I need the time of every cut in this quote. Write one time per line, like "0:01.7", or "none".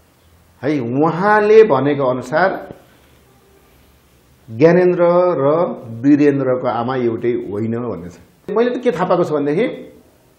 0:08.5